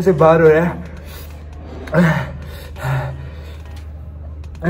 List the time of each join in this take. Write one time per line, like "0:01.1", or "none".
none